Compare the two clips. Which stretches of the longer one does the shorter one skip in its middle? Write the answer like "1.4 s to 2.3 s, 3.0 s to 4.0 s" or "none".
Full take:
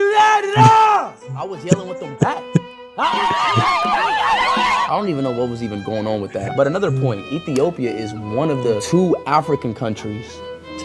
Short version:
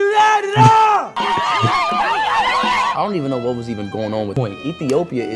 1.2 s to 3.1 s, 6.3 s to 7.0 s